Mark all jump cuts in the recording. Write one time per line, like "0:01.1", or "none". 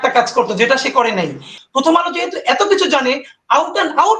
0:01.5